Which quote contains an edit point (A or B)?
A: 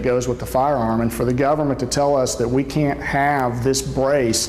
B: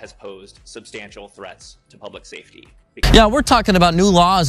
B